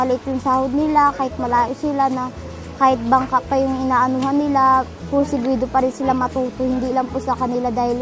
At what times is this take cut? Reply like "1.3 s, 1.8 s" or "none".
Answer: none